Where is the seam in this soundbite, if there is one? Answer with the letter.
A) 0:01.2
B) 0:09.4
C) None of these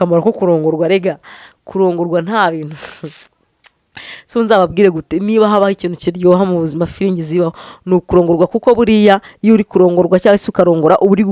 C